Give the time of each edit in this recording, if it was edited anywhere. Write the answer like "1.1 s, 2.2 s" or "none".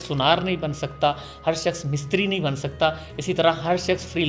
none